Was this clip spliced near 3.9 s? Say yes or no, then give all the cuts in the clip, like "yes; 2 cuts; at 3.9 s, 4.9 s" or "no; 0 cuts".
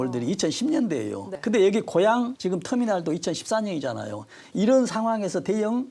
no; 2 cuts; at 1.3 s, 2.3 s